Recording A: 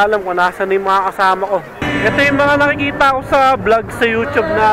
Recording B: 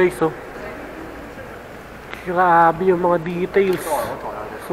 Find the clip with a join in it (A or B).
A